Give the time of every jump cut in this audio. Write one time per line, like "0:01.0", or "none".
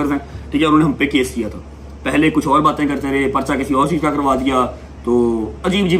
none

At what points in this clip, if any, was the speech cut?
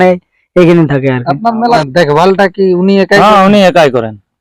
0:01.6

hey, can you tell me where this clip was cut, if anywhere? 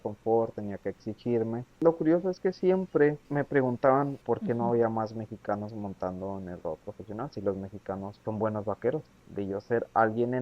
0:01.7
0:03.2
0:04.2
0:08.1
0:09.2

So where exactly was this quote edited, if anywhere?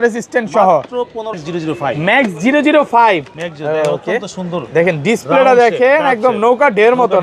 0:01.6

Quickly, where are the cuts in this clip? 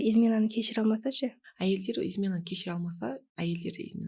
0:01.5

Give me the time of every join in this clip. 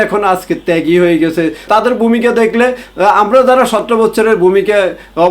0:01.6

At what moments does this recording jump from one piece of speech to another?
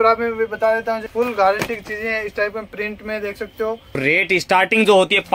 0:01.1
0:04.0

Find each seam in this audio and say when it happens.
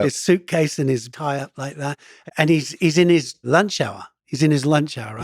0:01.1
0:02.1
0:03.4

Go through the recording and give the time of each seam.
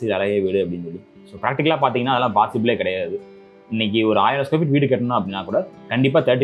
none

